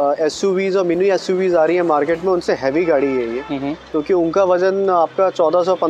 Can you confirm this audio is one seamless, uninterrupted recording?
yes; 0 cuts

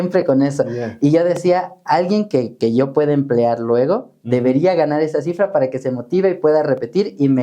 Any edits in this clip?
no; 0 cuts

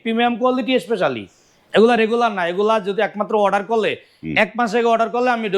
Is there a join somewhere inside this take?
no; 0 cuts

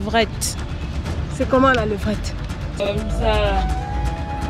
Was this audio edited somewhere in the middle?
yes; 1 cut; at 2.8 s

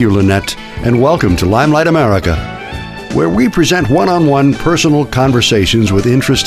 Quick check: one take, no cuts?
yes; 0 cuts

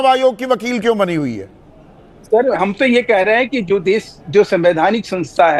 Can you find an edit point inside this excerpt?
no; 0 cuts

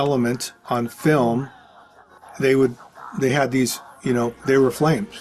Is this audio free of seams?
yes; 0 cuts

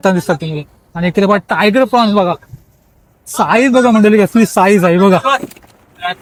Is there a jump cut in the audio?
no; 0 cuts

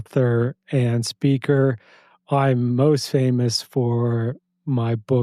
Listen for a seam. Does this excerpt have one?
no; 0 cuts

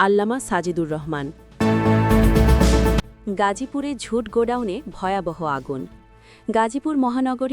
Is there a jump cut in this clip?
yes; 2 cuts; at 1.4 s, 3.0 s

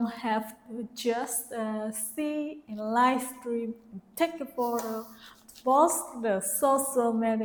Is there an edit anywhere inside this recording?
no; 0 cuts

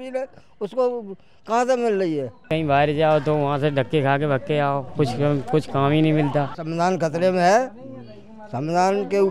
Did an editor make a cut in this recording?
yes; 2 cuts; at 2.5 s, 6.6 s

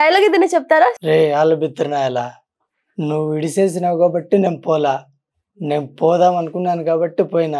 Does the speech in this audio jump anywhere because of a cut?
yes; 1 cut; at 1.0 s

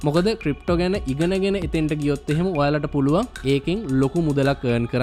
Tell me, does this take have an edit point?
no; 0 cuts

